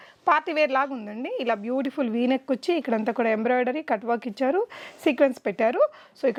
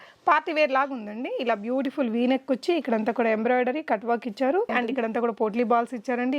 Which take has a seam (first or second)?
second